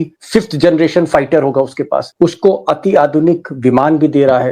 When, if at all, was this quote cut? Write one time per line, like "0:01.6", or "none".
0:02.1

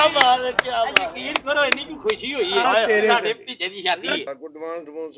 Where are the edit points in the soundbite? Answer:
0:04.2

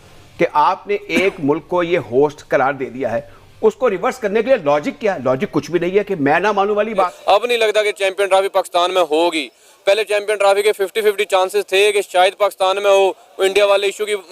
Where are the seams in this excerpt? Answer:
0:07.2

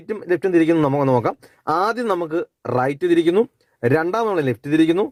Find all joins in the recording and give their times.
none

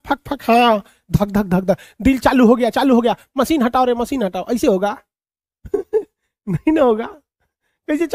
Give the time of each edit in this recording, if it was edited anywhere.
none

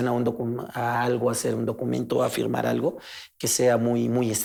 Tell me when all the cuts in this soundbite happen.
none

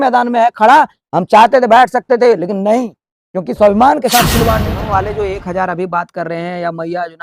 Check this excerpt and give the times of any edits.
0:04.6

